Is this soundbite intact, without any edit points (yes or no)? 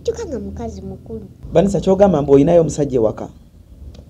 no